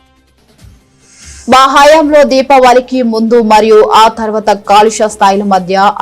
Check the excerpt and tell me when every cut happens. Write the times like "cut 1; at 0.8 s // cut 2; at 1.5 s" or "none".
cut 1; at 1.1 s